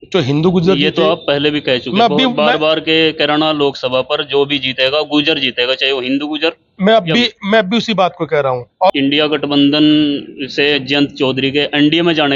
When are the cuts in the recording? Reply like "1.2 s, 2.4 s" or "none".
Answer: 8.9 s

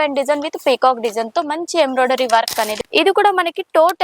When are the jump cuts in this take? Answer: 2.7 s

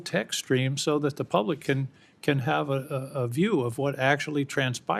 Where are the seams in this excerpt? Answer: none

